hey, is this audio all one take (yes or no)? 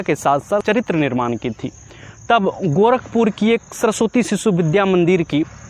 yes